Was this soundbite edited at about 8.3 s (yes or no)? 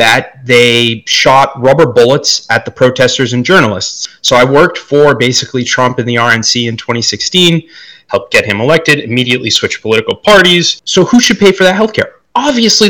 no